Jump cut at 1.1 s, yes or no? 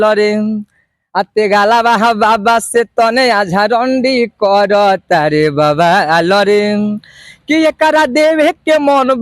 no